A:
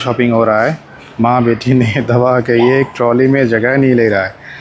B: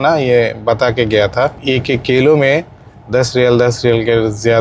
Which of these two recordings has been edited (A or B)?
B